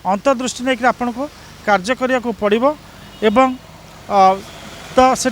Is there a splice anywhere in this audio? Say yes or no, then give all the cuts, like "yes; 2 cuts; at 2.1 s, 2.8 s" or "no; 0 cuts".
no; 0 cuts